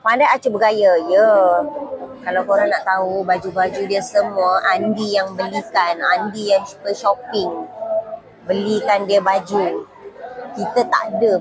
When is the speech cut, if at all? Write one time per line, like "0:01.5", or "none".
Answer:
none